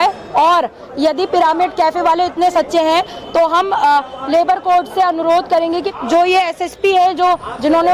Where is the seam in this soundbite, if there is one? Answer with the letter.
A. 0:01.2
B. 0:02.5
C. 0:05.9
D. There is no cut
C